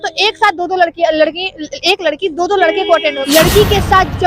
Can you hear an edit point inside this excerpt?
yes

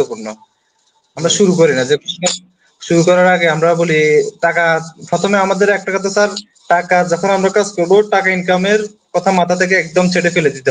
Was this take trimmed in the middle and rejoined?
no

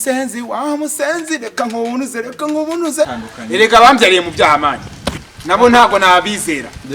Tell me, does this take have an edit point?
yes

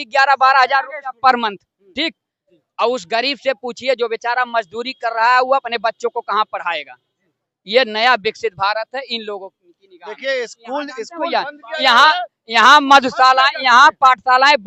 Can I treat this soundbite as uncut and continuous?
yes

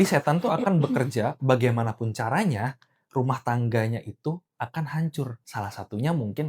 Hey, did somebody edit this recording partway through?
yes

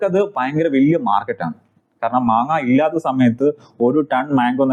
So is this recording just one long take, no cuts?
yes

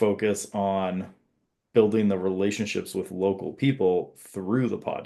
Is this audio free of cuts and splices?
yes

